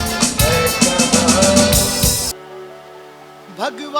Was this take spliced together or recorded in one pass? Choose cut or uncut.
cut